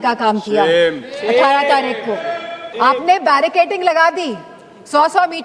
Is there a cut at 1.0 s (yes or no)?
no